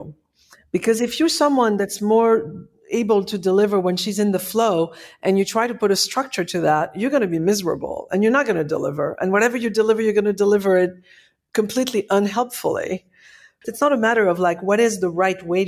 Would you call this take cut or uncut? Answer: cut